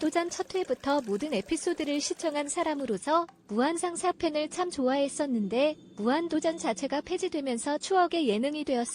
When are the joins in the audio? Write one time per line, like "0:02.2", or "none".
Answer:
none